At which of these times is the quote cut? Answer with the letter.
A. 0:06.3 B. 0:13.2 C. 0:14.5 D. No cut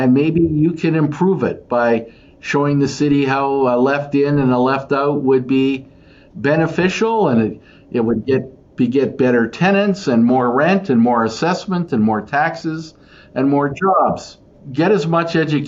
C